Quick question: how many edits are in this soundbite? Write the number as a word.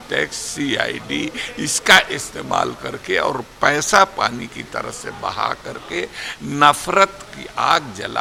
zero